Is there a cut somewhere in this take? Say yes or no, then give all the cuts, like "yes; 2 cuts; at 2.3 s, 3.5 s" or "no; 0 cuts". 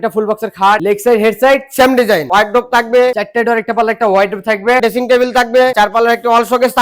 yes; 5 cuts; at 0.8 s, 2.2 s, 3.2 s, 4.8 s, 5.7 s